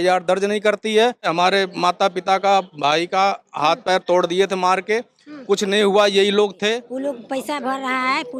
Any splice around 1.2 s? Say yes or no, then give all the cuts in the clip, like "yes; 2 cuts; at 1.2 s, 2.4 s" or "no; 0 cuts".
yes; 2 cuts; at 1.2 s, 6.9 s